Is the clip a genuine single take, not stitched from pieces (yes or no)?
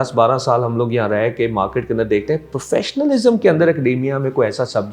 yes